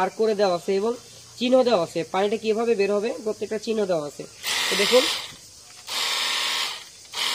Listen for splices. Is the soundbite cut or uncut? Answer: uncut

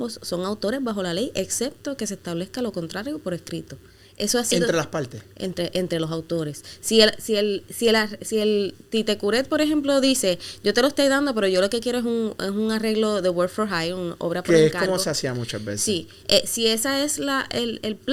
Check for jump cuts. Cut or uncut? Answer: uncut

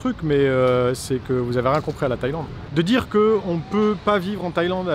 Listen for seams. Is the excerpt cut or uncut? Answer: cut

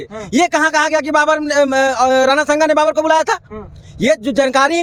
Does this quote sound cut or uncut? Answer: uncut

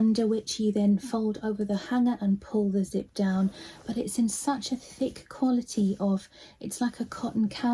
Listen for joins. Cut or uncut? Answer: uncut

